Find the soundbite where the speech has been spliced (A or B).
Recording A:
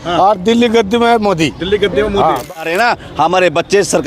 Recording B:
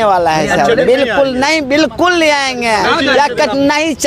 A